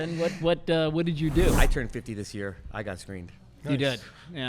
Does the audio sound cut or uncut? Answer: cut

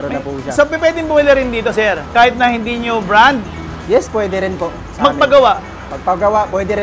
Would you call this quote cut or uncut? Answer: cut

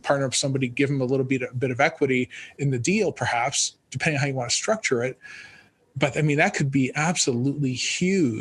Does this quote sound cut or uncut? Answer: uncut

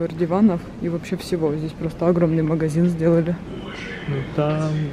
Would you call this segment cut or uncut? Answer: uncut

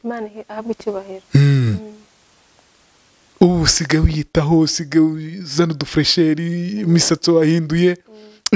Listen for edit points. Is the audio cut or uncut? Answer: uncut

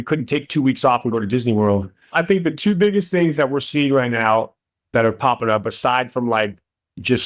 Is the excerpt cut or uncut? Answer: cut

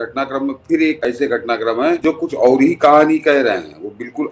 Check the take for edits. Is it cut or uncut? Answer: cut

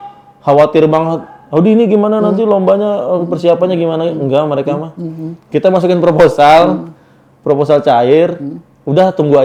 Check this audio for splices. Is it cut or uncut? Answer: uncut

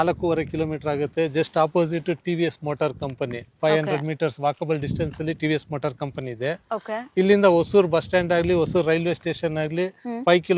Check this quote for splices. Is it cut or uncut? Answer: uncut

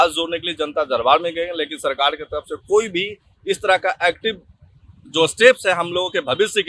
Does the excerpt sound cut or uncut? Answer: uncut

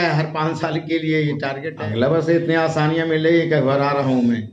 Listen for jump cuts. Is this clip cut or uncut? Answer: cut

